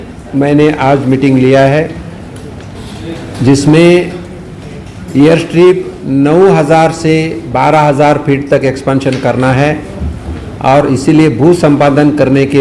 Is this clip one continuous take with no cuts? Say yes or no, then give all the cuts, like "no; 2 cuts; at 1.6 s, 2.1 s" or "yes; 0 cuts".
yes; 0 cuts